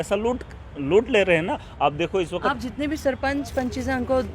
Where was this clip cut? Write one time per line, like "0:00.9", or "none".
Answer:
none